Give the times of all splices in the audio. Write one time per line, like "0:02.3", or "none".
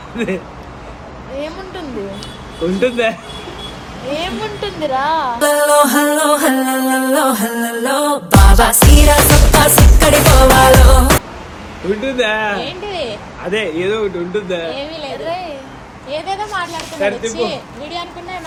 none